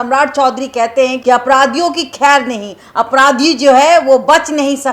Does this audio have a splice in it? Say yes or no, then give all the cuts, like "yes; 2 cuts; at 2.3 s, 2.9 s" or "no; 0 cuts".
yes; 1 cut; at 1.2 s